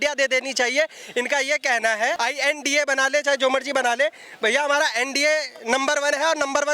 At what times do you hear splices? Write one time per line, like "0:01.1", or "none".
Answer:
0:02.2